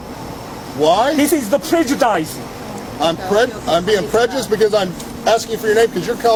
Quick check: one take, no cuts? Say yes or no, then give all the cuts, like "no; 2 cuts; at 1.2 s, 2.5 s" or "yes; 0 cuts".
yes; 0 cuts